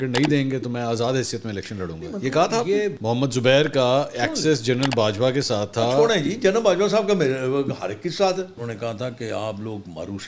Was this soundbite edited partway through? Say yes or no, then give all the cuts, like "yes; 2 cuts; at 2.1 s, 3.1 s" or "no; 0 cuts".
yes; 2 cuts; at 3.0 s, 8.5 s